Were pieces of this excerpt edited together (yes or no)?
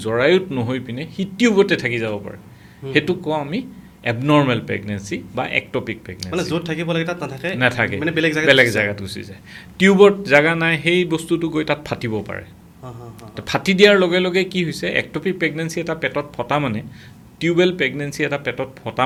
no